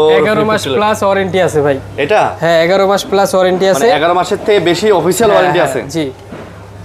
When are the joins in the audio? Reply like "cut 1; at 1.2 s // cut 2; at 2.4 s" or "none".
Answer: none